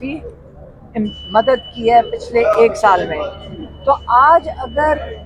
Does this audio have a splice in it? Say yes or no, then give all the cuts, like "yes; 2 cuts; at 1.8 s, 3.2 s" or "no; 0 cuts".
no; 0 cuts